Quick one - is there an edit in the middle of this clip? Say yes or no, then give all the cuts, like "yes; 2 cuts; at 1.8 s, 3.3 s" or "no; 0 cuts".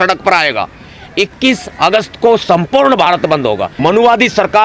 yes; 1 cut; at 3.7 s